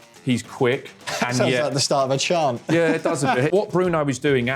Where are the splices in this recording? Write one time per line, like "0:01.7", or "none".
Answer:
0:01.0
0:03.5